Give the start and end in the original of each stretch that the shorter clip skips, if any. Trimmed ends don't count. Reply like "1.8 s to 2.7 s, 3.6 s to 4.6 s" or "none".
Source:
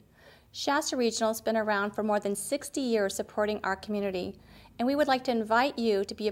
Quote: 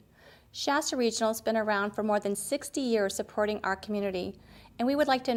none